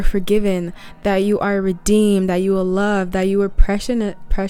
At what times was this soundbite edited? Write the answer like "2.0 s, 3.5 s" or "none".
none